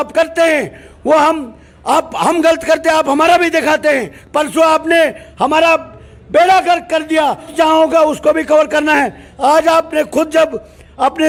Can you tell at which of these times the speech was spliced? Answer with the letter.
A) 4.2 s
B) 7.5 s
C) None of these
C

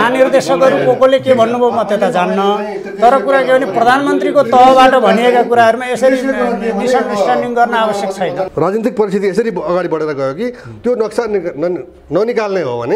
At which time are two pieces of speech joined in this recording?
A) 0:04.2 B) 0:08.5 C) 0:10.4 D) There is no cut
B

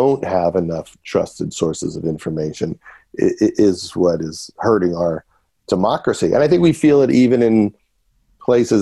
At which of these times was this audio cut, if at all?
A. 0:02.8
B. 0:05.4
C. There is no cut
C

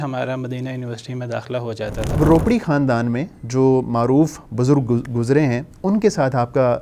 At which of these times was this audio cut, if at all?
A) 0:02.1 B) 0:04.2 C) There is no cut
A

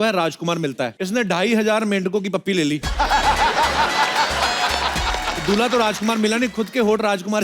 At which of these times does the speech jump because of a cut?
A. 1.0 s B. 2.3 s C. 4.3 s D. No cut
A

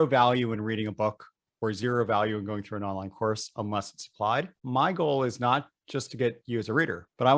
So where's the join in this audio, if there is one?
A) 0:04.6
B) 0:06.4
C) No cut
A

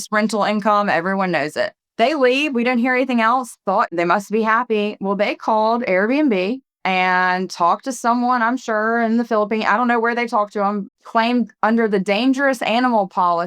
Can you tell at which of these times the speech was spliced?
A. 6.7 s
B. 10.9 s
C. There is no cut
B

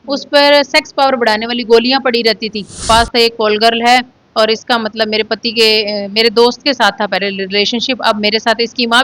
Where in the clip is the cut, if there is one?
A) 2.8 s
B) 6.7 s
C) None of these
A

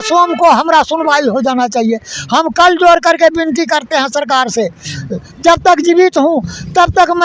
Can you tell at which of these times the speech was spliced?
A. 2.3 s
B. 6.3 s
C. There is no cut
C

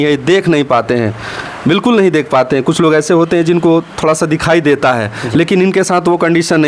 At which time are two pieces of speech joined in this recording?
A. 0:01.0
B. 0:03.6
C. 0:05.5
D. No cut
D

